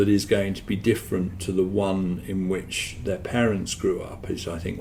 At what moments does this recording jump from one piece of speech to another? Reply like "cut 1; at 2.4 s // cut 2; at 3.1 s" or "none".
none